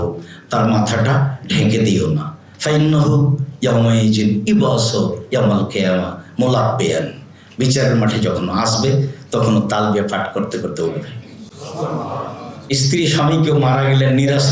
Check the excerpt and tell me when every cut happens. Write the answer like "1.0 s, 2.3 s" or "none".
12.7 s